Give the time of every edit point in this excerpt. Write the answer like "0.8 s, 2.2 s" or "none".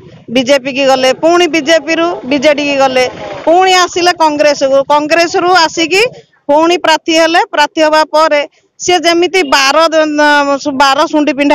none